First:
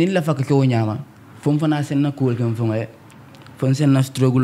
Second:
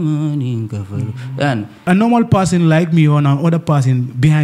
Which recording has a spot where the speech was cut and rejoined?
second; 1 cut; at 1.8 s

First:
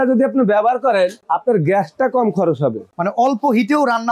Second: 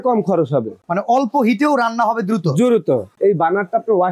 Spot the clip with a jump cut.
second; 1 cut; at 3.1 s

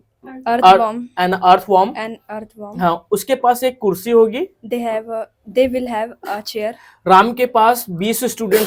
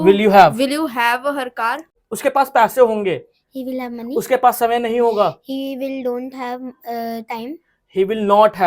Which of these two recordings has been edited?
second; 1 cut; at 1.9 s

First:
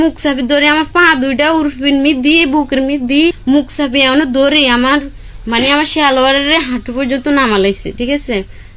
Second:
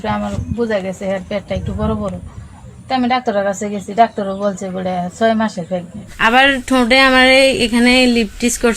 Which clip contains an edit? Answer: second; 1 cut; at 6.2 s

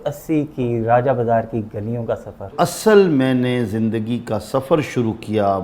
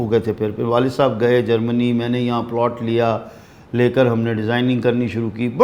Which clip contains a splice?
first; 1 cut; at 2.5 s

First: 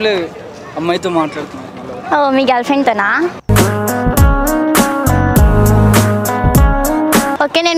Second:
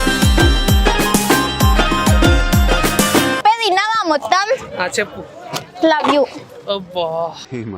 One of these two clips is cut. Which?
second; 1 cut; at 3.4 s

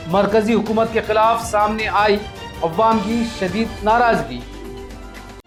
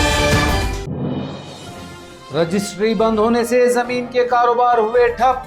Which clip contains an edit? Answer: second; 1 cut; at 2.1 s

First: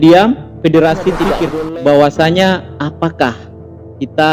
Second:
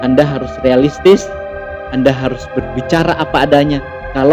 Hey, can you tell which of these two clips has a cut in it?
first; 1 cut; at 1.4 s

